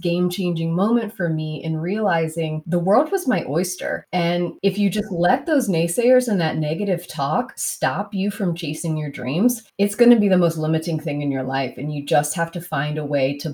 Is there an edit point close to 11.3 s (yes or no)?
no